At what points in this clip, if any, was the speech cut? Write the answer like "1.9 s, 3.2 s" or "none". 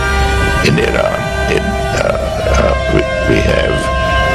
none